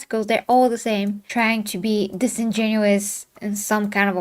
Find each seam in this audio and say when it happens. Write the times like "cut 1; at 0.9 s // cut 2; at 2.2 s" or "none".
cut 1; at 1.2 s